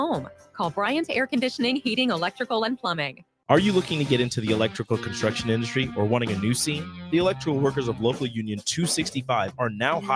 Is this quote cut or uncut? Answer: uncut